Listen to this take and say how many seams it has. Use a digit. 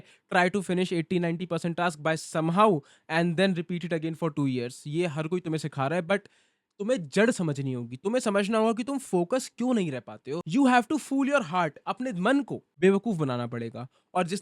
1